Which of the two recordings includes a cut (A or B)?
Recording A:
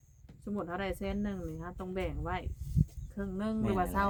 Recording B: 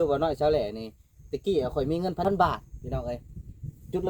B